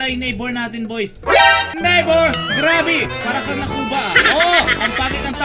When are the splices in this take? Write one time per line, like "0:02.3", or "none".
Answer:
0:01.7